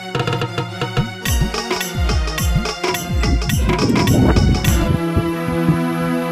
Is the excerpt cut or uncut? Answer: uncut